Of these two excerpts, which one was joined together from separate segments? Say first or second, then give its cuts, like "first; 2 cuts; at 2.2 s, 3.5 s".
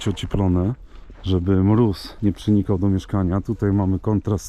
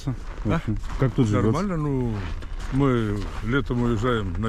first; 1 cut; at 2.1 s